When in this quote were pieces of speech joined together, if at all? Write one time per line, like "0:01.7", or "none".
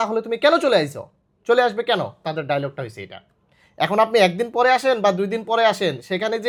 none

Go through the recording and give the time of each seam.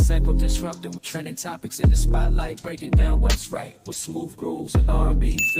0:01.0

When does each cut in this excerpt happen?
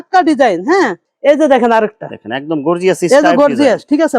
0:01.1

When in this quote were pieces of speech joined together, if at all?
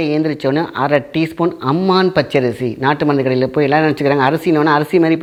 none

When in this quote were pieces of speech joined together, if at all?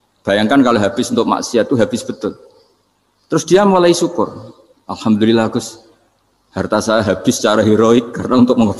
none

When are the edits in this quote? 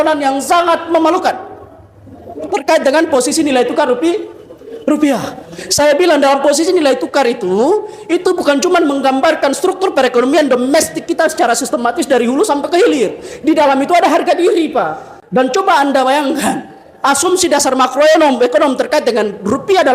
0:15.1

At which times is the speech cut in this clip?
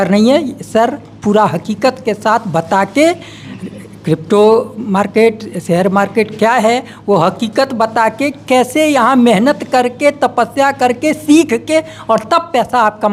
none

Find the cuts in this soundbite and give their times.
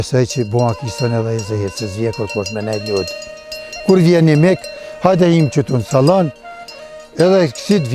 none

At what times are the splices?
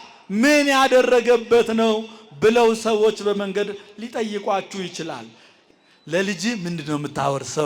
0:05.5

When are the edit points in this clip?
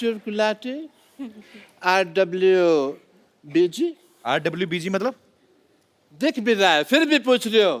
none

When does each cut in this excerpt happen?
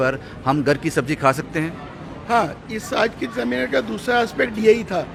none

